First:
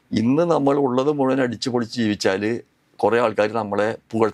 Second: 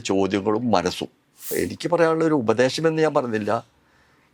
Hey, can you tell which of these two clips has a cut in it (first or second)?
second